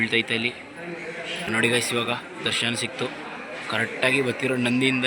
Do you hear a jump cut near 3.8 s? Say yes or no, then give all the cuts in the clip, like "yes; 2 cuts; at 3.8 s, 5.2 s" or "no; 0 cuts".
no; 1 cut; at 1.5 s